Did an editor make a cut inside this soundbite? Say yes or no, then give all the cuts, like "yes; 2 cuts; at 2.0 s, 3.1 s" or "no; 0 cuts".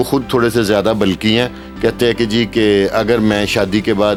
no; 0 cuts